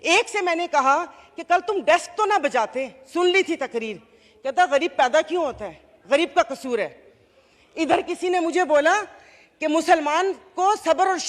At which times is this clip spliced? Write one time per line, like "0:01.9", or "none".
none